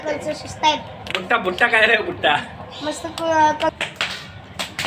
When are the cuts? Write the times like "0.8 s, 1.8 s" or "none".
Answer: 3.8 s